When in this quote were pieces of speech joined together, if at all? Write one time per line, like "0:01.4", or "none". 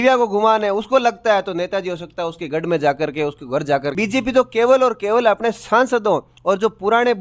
0:03.9